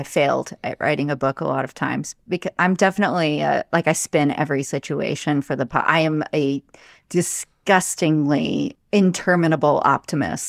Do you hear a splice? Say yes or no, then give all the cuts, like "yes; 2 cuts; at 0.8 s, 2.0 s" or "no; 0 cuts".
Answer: yes; 1 cut; at 8.7 s